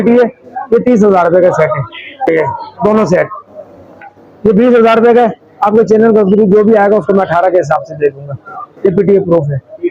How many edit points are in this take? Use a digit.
1